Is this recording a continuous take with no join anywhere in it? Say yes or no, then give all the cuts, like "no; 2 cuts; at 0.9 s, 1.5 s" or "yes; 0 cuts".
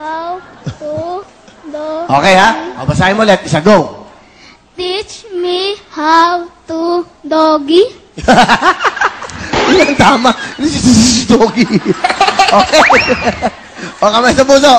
yes; 0 cuts